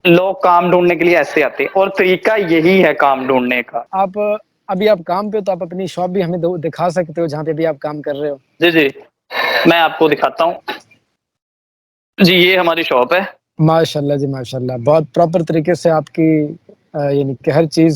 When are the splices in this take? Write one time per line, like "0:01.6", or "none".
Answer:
0:03.9

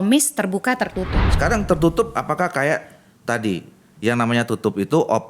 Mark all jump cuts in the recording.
0:01.3

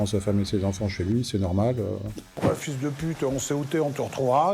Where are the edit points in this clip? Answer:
0:02.4

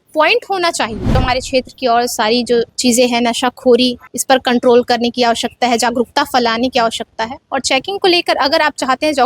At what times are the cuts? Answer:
0:01.1
0:02.7
0:04.1

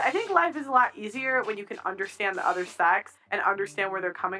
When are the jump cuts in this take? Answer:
0:03.3

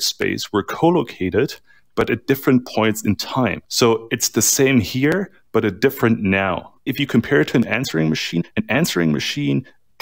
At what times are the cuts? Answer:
0:03.6
0:06.9

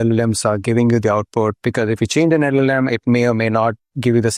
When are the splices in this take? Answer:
none

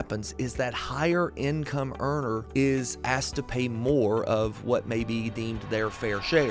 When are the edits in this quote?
none

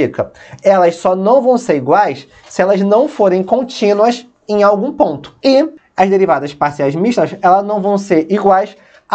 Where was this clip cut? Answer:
0:05.3
0:05.8

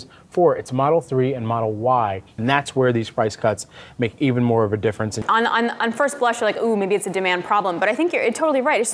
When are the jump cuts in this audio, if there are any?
0:02.3
0:05.2

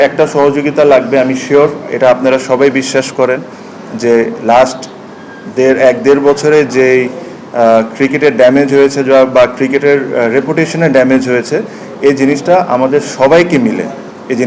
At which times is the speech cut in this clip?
none

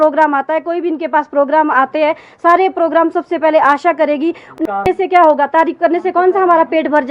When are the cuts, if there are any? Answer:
0:04.6

